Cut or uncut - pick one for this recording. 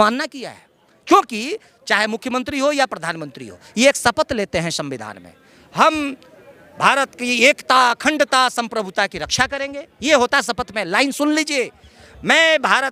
uncut